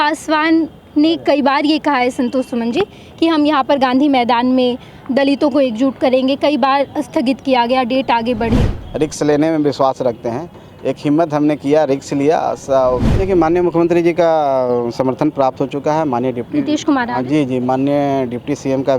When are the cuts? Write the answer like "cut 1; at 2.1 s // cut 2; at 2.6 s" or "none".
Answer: cut 1; at 8.8 s // cut 2; at 13.1 s